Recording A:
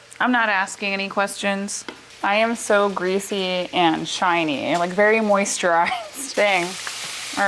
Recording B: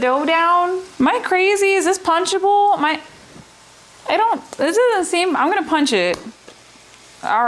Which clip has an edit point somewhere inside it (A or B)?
A